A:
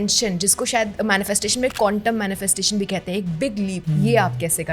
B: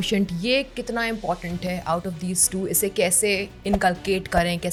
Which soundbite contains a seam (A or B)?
A